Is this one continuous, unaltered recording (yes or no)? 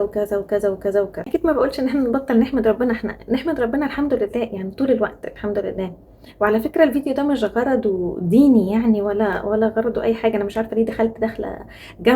yes